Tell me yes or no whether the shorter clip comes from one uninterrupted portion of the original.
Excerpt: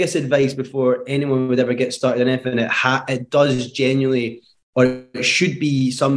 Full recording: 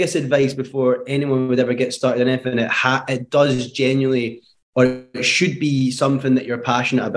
yes